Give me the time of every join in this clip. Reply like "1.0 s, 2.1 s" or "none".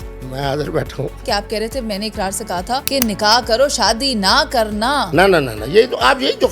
1.2 s, 2.9 s